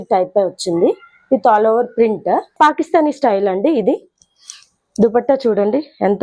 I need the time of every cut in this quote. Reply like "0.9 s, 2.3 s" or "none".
2.5 s